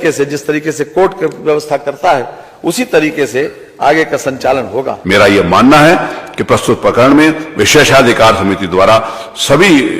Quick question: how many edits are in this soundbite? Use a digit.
1